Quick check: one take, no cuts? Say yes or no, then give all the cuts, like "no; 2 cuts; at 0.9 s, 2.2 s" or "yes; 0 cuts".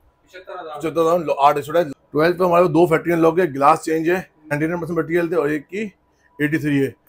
no; 2 cuts; at 2.0 s, 4.5 s